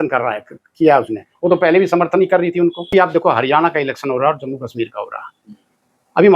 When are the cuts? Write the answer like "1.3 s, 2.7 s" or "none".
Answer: 2.9 s